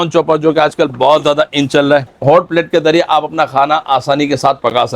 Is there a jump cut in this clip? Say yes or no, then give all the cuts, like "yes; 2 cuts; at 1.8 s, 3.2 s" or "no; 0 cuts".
yes; 1 cut; at 2.1 s